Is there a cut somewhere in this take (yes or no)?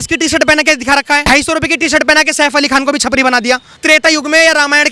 yes